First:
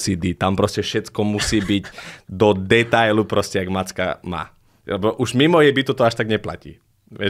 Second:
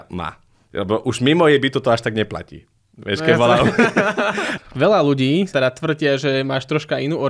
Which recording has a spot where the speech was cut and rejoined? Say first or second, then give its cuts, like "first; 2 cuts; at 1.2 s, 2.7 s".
second; 1 cut; at 4.5 s